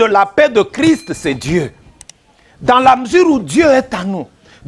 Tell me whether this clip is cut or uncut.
uncut